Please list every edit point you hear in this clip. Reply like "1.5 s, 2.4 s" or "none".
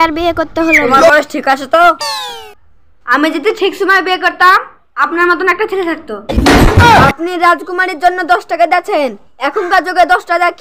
1.1 s, 7.1 s